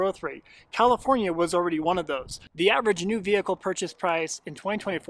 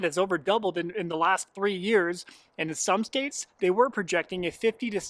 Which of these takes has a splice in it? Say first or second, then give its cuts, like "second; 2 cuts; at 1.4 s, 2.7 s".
first; 1 cut; at 2.4 s